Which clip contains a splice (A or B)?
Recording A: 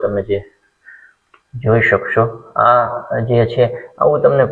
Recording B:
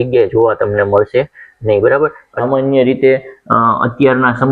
B